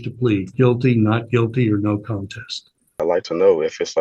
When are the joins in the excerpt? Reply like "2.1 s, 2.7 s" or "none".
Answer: 3.0 s